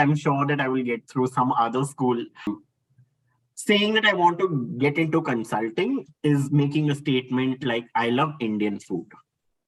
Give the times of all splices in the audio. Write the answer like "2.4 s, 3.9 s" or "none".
2.5 s